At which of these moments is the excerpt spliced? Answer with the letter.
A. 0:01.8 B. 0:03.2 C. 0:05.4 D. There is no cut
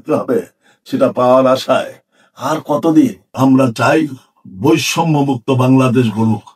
B